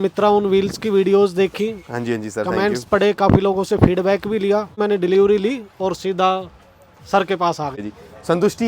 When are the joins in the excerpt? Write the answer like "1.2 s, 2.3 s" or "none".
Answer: 4.8 s, 7.8 s